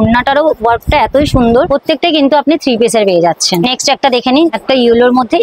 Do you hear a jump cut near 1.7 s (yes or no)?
yes